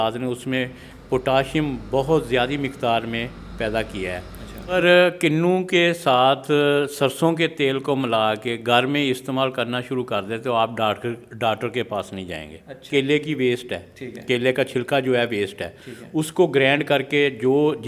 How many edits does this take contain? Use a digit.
2